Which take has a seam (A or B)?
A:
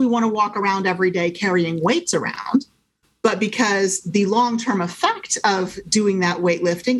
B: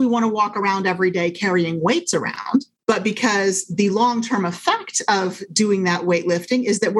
B